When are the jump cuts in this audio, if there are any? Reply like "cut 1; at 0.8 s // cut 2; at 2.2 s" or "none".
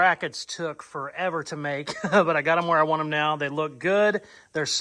none